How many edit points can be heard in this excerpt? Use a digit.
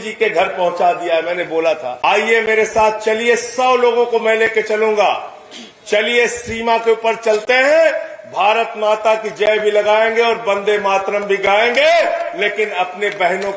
1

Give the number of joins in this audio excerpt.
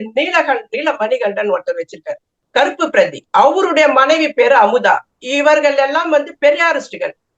1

